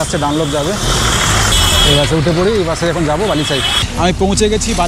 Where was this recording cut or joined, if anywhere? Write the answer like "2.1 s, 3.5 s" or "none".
1.5 s, 3.8 s